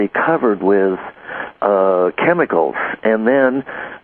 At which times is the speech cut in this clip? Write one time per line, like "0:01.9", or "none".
0:02.2